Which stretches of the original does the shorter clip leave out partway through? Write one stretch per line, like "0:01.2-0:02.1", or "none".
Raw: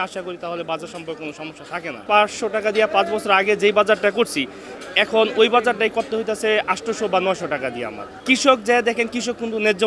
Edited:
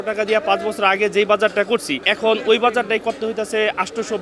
0:04.5-0:04.9